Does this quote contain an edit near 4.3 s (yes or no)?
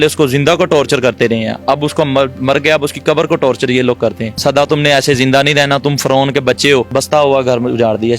yes